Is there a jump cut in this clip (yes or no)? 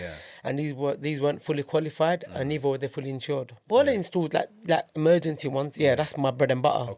yes